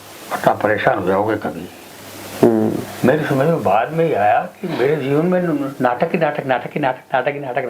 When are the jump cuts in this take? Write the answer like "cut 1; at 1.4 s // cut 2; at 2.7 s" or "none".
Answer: none